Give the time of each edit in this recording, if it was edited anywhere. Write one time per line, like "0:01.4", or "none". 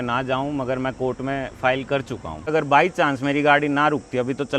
0:02.5